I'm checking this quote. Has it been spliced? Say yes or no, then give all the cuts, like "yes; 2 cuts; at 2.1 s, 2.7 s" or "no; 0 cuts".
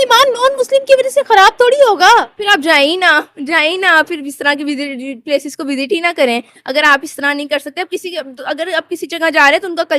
no; 0 cuts